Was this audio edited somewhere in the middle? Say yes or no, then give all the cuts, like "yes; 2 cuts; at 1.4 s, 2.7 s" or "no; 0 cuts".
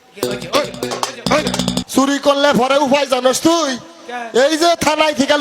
yes; 1 cut; at 1.8 s